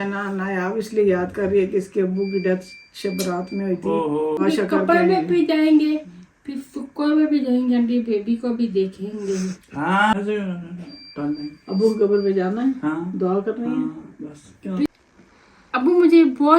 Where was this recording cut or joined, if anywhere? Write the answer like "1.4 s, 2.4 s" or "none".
4.4 s, 10.1 s, 14.9 s